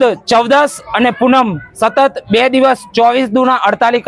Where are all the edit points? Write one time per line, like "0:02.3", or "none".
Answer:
none